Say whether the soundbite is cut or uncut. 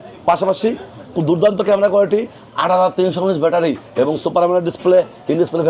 cut